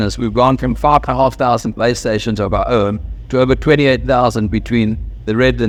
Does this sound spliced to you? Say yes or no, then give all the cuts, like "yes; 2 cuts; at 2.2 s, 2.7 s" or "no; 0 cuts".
no; 0 cuts